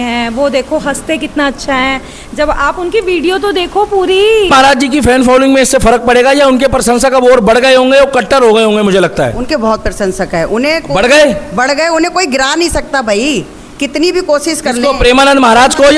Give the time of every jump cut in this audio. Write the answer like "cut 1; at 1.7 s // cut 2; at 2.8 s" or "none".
cut 1; at 4.5 s